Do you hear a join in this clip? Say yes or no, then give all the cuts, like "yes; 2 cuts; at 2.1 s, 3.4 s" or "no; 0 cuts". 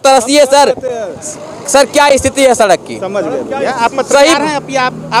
no; 0 cuts